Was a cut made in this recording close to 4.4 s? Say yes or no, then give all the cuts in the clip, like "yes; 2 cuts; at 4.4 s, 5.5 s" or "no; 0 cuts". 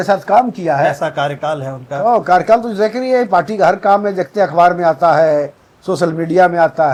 no; 0 cuts